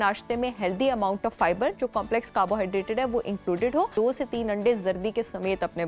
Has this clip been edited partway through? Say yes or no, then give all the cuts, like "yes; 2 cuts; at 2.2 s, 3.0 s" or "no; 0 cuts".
yes; 1 cut; at 3.9 s